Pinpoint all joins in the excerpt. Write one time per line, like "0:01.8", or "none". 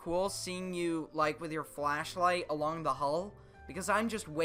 none